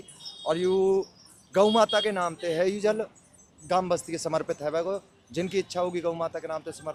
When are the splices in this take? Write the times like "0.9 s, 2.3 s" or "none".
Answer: none